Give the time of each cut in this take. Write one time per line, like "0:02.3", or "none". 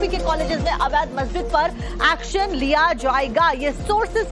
0:02.8